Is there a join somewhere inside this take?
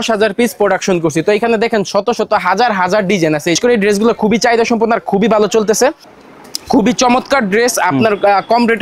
yes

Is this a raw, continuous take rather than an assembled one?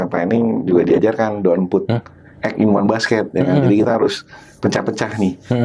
yes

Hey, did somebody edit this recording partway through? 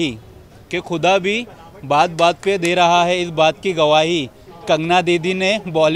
no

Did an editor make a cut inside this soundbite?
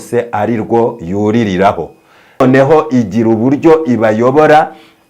yes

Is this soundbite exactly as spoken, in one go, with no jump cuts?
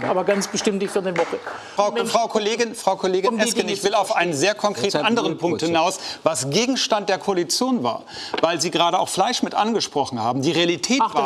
no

